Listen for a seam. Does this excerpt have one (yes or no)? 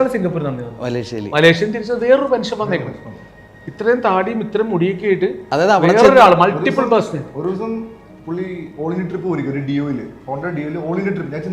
no